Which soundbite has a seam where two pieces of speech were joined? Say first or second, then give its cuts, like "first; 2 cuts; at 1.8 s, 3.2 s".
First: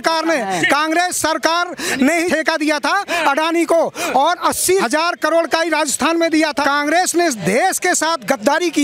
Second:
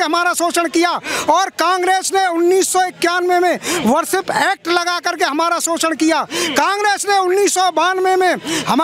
first; 3 cuts; at 2.3 s, 4.7 s, 6.6 s